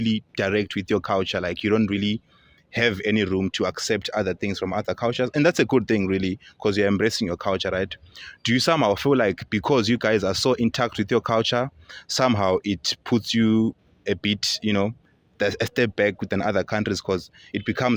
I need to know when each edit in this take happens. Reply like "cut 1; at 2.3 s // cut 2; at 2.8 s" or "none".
none